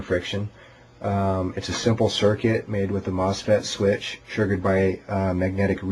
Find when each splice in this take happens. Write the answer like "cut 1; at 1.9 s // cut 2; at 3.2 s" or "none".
cut 1; at 2.5 s